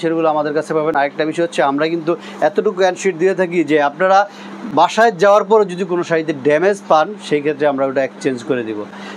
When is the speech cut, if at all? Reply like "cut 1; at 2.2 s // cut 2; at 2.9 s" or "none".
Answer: none